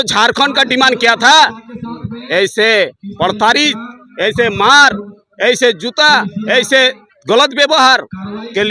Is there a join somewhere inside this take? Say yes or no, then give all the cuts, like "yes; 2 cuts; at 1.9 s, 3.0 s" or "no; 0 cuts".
no; 0 cuts